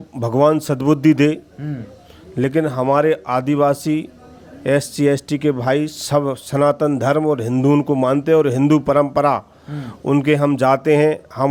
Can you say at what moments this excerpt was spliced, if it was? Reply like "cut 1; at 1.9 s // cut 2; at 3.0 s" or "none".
none